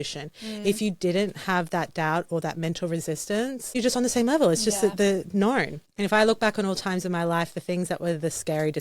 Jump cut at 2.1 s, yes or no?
no